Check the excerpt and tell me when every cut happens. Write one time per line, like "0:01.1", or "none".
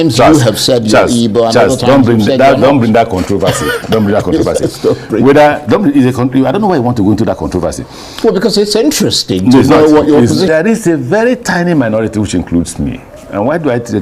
0:10.5

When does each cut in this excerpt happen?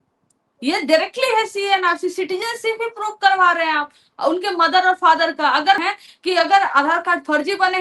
0:05.8

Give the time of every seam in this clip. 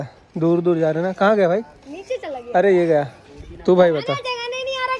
none

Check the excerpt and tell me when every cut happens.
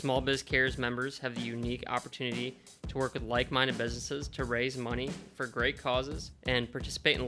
0:06.3

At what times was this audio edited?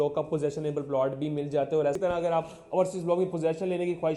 0:02.0

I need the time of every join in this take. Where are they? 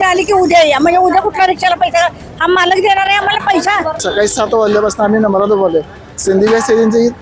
0:03.9

